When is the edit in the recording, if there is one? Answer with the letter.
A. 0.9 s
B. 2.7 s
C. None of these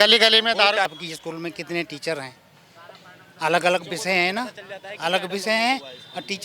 A